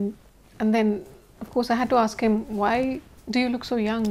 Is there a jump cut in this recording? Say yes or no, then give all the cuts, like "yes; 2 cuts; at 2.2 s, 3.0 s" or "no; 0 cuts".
no; 0 cuts